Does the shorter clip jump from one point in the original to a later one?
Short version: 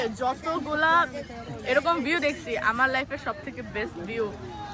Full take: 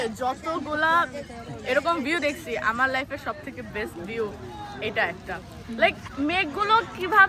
no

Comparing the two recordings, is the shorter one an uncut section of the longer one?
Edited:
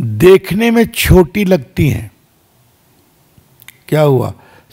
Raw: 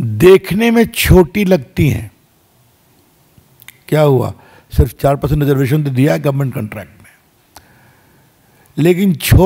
yes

